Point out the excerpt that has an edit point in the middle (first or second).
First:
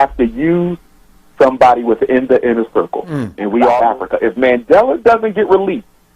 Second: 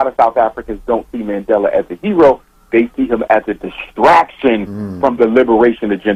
first